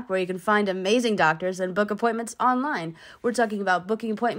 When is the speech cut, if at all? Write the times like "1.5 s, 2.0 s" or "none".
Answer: none